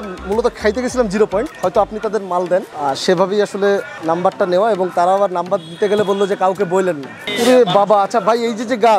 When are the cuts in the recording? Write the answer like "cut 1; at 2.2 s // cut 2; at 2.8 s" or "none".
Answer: cut 1; at 1.5 s // cut 2; at 2.7 s // cut 3; at 3.9 s // cut 4; at 7.3 s